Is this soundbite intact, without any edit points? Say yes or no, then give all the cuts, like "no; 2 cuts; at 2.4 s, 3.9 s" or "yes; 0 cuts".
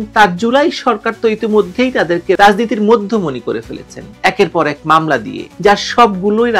yes; 0 cuts